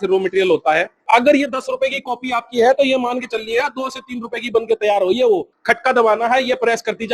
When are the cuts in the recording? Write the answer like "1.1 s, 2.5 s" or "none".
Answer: 1.0 s, 5.5 s